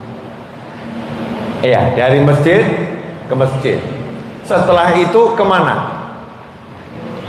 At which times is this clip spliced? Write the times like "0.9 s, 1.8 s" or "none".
4.3 s